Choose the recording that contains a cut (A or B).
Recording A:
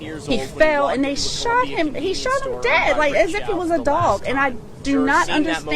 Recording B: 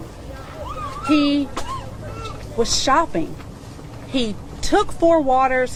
A